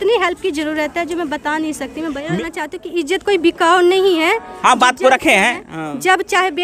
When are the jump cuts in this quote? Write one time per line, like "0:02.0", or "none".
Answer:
0:02.3